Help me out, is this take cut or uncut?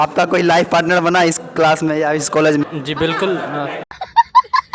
cut